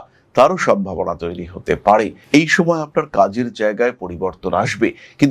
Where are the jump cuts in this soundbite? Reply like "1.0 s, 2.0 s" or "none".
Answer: 2.2 s